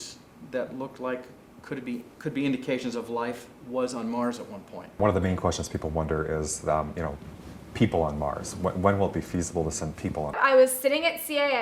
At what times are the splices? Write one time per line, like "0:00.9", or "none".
0:05.0
0:10.4